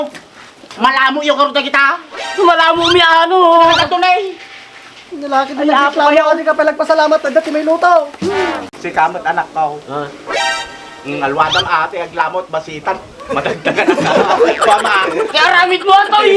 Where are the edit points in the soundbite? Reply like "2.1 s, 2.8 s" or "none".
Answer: 8.7 s